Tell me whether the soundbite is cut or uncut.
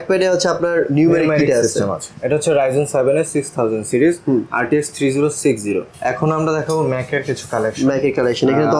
cut